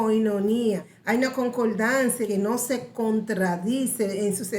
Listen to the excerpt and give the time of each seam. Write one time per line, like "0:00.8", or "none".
0:00.9
0:02.5